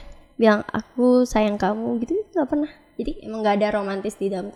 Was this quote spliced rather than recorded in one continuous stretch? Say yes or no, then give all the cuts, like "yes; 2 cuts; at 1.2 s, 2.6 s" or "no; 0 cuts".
no; 0 cuts